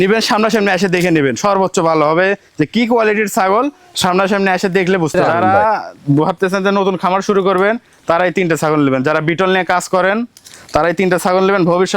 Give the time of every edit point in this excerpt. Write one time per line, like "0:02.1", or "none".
0:05.1